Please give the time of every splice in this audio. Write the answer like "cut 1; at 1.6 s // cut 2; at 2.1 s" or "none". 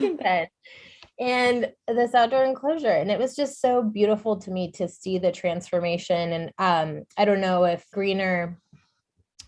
cut 1; at 7.9 s